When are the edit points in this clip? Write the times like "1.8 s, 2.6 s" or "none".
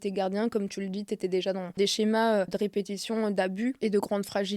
1.7 s, 2.5 s, 3.8 s

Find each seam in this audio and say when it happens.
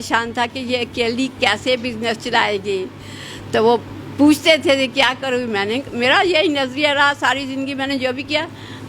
none

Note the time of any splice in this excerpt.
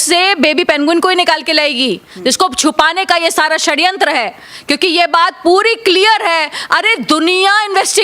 none

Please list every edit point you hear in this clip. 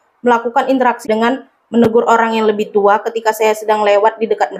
1.1 s

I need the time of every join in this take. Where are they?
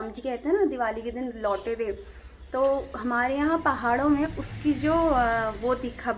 none

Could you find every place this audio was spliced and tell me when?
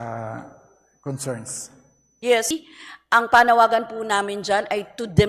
2.5 s

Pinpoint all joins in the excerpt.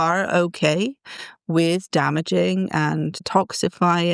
3.2 s

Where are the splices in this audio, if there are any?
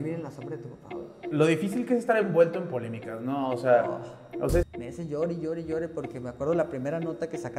1.1 s, 4.6 s

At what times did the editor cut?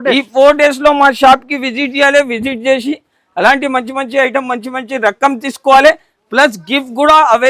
none

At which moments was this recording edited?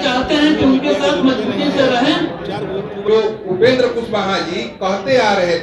2.9 s

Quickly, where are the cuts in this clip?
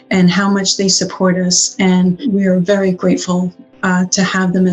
2.2 s

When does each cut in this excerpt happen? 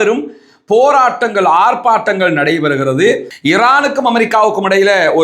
3.3 s

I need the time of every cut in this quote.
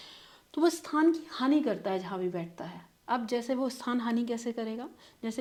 none

